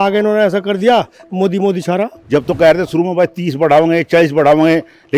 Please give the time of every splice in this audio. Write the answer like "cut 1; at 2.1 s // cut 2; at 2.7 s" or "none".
cut 1; at 2.2 s

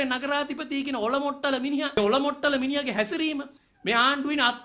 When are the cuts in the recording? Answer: cut 1; at 2.0 s // cut 2; at 3.6 s

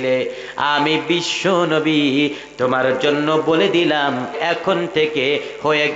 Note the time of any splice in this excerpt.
cut 1; at 4.4 s

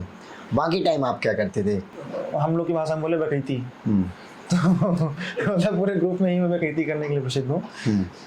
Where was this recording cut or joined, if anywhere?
cut 1; at 1.9 s

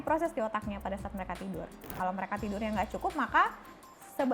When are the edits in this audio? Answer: cut 1; at 1.9 s

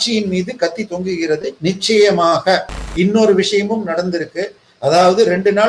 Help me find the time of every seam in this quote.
cut 1; at 1.5 s // cut 2; at 2.8 s

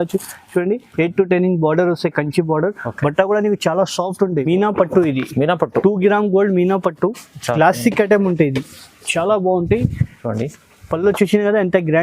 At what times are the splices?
cut 1; at 4.5 s

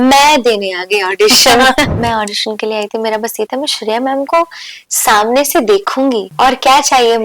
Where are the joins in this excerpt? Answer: cut 1; at 1.9 s // cut 2; at 6.3 s

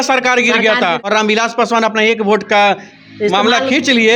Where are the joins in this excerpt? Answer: cut 1; at 1.0 s

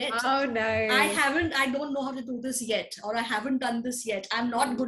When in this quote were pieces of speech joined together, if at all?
none

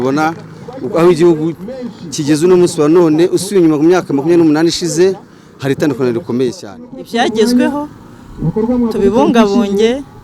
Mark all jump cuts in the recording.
cut 1; at 7.0 s

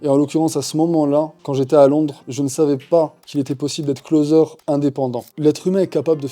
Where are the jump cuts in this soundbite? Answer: cut 1; at 5.3 s

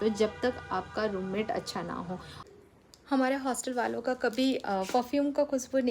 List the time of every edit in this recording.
cut 1; at 2.4 s

